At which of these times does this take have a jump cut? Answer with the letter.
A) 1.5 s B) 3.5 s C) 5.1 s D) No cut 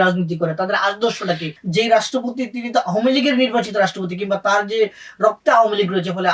A